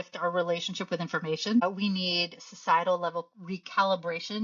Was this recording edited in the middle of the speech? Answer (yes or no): yes